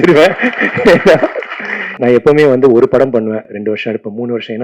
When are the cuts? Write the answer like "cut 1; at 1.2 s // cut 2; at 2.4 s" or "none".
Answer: cut 1; at 2.0 s // cut 2; at 3.5 s